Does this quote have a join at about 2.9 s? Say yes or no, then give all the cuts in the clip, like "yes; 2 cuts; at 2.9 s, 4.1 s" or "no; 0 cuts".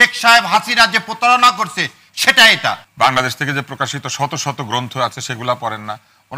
yes; 1 cut; at 2.9 s